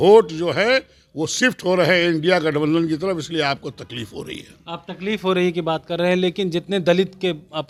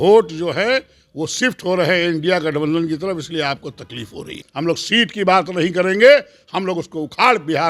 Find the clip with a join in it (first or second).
second